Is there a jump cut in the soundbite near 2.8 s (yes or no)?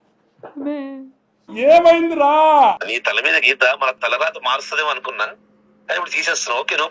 yes